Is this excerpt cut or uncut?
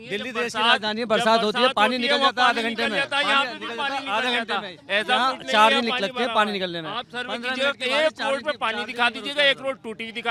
uncut